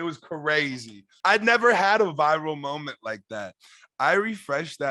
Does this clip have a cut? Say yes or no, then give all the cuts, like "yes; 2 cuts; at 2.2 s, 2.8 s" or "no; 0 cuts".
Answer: yes; 1 cut; at 1.0 s